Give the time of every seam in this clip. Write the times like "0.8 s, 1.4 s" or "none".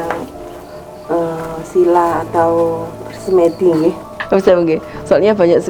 4.1 s